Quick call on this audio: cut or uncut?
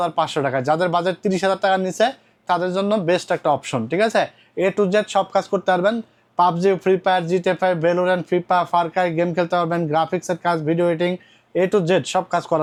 uncut